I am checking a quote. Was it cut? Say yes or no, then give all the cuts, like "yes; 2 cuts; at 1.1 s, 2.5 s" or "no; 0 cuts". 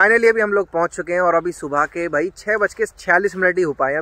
no; 0 cuts